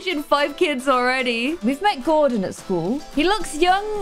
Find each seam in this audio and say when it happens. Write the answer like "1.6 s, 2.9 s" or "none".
1.6 s

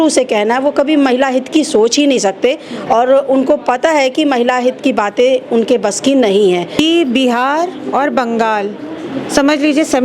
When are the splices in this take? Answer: 6.8 s

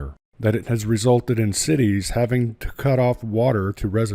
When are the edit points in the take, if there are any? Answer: none

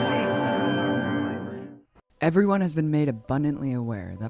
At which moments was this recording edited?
none

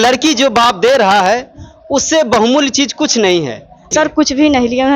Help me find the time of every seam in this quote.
3.9 s

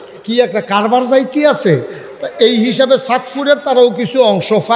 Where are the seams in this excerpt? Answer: none

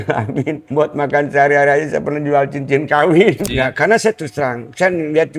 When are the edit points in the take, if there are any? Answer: 3.5 s

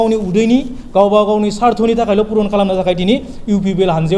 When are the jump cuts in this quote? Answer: none

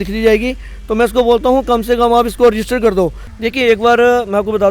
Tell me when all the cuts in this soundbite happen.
3.3 s

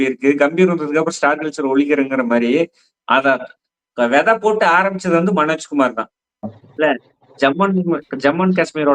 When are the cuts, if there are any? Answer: 6.6 s

